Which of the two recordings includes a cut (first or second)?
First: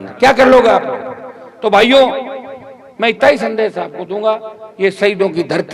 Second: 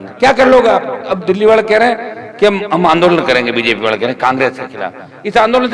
second